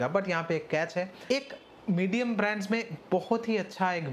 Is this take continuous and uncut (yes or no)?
no